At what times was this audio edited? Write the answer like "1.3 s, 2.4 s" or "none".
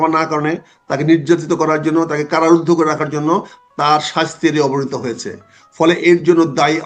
none